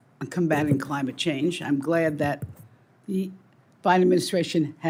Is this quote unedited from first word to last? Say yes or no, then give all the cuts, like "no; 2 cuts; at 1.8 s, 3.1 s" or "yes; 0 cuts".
yes; 0 cuts